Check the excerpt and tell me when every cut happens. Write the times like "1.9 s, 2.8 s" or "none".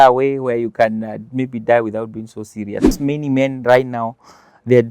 2.9 s